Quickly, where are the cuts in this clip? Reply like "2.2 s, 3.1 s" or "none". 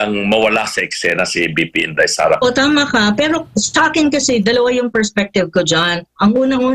2.4 s